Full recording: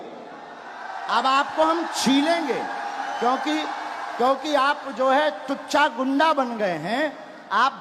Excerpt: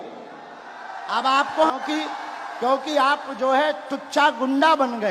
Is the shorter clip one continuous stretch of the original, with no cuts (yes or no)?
no